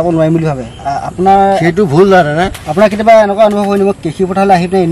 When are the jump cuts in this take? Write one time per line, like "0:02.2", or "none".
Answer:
0:02.6